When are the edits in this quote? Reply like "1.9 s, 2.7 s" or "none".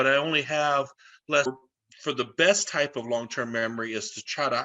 1.5 s